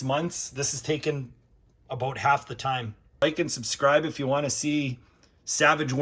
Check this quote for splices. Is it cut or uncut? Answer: cut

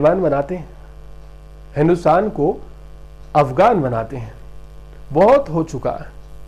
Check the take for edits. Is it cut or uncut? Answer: uncut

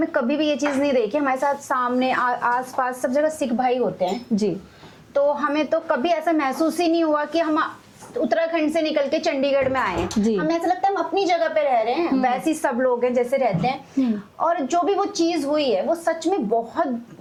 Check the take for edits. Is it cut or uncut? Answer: uncut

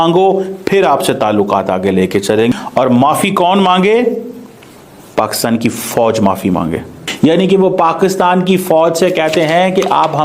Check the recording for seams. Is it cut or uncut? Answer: cut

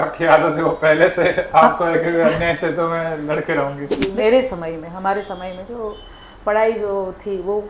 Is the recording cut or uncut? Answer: cut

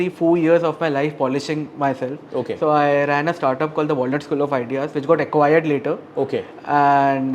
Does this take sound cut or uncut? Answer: uncut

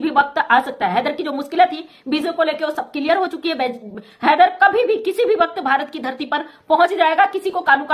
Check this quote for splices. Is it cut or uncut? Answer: uncut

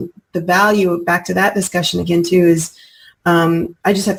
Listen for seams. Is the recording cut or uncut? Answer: uncut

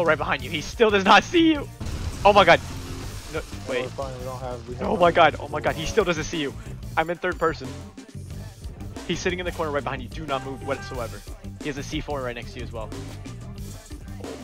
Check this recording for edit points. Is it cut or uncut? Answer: uncut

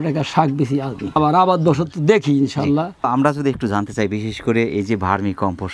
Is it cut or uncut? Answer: uncut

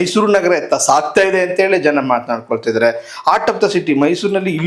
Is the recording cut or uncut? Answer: uncut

